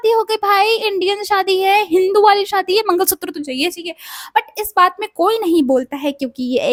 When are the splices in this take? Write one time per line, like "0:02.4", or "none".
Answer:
none